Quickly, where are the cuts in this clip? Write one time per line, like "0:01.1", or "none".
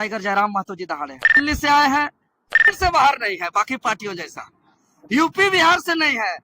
0:01.3
0:02.7